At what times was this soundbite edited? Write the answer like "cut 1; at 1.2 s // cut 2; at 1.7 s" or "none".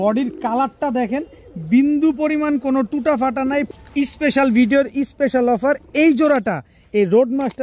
cut 1; at 3.7 s